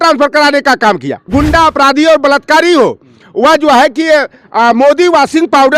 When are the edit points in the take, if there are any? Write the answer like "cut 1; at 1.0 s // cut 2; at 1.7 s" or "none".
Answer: cut 1; at 1.2 s